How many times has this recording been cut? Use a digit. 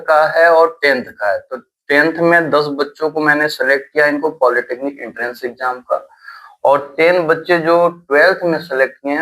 0